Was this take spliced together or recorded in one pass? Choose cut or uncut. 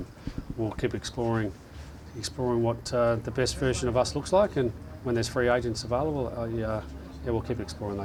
uncut